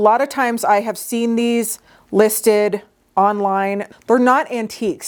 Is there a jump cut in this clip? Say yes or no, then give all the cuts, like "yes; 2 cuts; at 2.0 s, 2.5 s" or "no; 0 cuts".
no; 0 cuts